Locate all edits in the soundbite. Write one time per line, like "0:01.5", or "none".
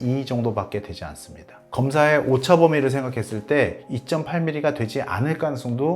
0:01.7